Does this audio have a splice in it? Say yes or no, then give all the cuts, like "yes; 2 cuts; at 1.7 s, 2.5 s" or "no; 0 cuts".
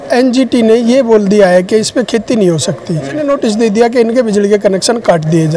yes; 1 cut; at 3.2 s